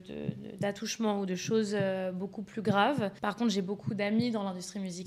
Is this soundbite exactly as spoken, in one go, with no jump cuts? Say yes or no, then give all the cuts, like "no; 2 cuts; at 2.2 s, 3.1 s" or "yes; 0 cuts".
no; 1 cut; at 3.2 s